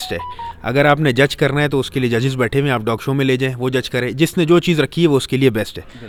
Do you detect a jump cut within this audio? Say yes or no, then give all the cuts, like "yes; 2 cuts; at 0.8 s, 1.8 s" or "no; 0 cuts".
no; 0 cuts